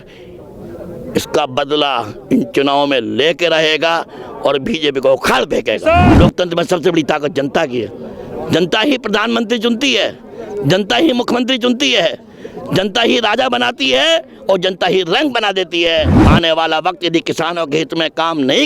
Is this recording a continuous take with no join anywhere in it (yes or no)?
no